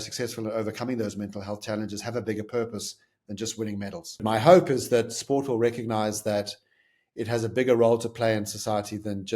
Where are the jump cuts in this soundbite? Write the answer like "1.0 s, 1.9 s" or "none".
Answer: 4.2 s